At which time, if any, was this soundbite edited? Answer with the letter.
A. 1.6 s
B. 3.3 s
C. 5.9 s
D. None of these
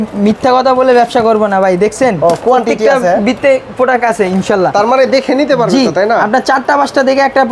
D